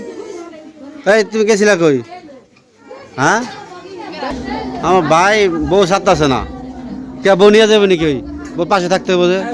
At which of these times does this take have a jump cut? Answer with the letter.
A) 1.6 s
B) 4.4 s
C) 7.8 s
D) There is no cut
B